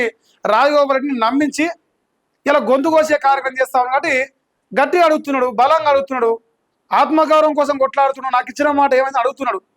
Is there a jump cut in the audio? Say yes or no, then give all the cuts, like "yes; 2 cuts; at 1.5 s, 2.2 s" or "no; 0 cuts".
no; 0 cuts